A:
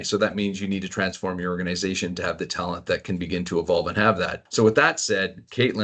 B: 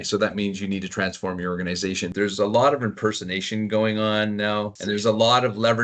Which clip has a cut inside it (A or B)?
B